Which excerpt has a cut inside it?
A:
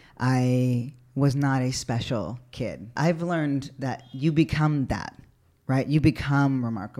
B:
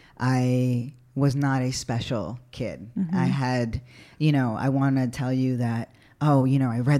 A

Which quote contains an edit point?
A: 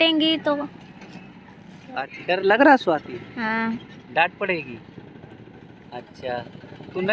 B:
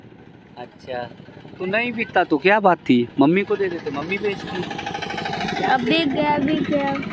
A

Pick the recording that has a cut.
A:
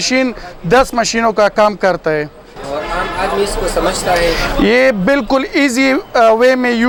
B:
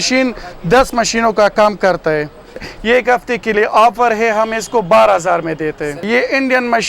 B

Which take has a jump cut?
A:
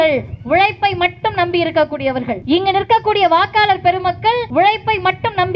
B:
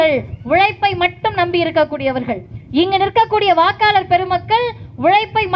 A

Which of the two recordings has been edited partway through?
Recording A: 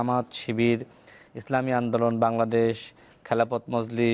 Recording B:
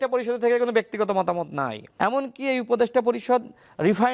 B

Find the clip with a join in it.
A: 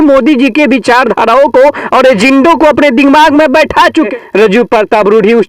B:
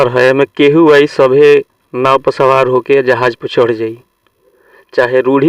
A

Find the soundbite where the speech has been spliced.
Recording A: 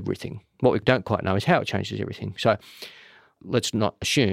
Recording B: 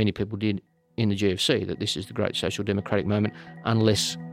A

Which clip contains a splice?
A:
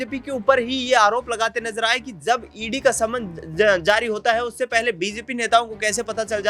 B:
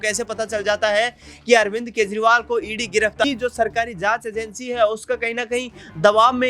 B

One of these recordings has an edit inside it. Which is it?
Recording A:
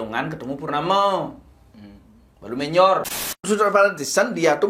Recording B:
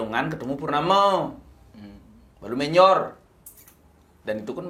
A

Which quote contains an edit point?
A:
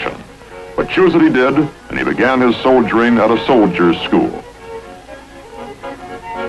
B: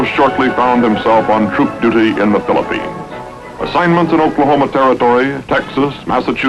B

